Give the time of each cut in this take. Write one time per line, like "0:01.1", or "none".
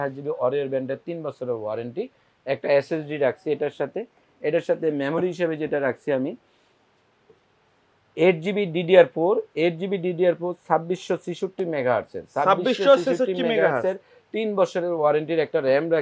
none